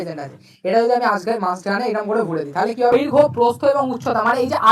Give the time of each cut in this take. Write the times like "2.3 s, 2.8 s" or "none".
2.9 s